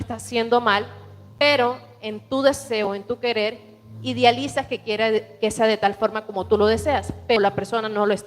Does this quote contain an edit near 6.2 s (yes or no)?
no